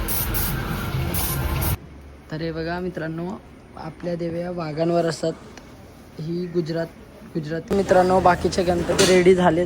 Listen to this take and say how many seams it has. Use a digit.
2